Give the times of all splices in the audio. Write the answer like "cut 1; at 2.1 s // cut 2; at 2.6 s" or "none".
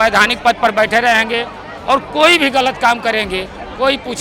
none